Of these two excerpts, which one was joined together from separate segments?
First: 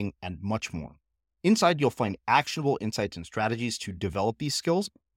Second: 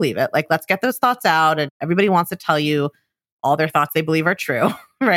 second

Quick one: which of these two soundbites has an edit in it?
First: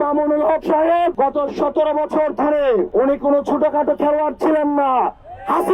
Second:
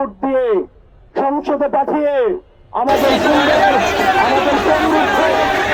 first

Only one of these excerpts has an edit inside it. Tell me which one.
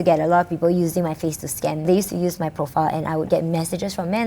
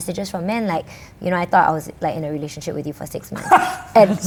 first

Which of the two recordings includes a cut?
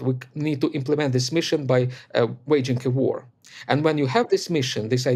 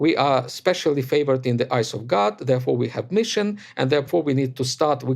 second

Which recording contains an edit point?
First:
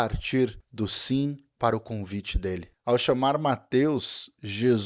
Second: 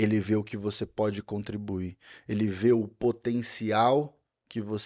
first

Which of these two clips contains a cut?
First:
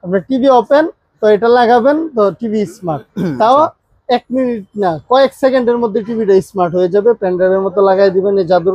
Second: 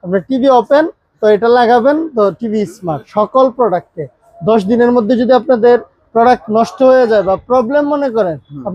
second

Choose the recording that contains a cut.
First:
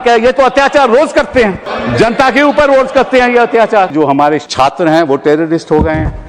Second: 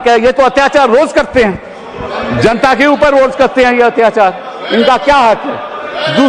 first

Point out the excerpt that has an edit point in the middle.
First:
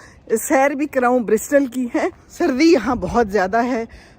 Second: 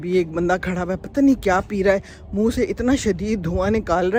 first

